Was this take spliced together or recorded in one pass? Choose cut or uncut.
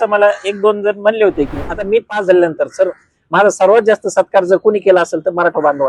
cut